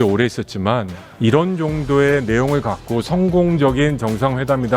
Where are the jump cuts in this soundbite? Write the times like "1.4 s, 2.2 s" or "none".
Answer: 1.0 s